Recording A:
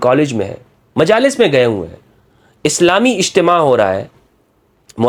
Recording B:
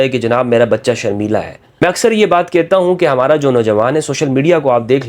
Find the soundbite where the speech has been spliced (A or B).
B